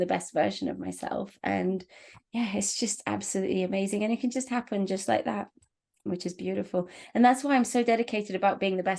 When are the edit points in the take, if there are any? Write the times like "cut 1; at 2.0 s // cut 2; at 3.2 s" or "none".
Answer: none